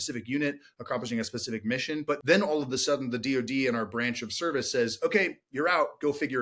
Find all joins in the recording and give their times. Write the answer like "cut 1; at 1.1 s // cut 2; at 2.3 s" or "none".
cut 1; at 2.1 s